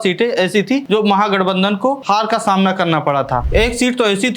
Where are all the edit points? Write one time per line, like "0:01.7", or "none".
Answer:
0:00.8
0:02.0
0:03.5